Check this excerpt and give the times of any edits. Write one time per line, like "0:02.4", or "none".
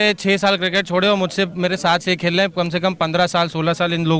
none